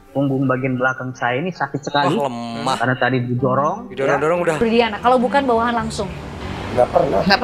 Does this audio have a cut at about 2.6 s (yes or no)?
no